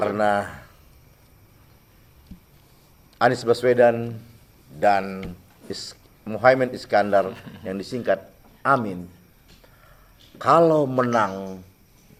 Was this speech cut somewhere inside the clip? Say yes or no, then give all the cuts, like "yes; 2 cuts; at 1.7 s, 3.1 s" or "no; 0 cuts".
no; 0 cuts